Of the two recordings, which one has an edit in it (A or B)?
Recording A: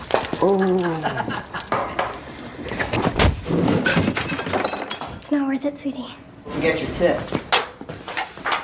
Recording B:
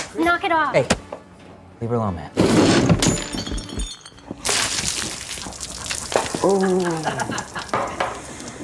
A